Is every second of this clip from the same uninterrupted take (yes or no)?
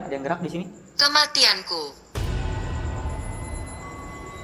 yes